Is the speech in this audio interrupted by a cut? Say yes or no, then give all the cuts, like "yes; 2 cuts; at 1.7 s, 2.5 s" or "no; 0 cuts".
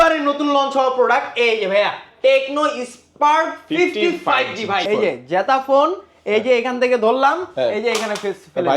yes; 1 cut; at 4.9 s